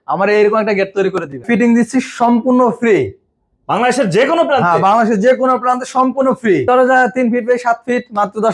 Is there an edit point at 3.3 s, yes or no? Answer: no